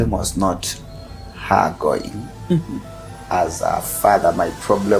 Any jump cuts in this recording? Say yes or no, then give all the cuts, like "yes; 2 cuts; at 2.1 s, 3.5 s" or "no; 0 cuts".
no; 0 cuts